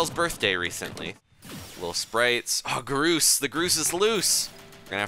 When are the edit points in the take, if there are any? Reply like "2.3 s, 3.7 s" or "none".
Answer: 1.2 s